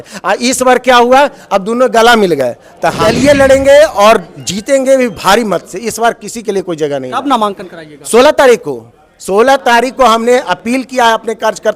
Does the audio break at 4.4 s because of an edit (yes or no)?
no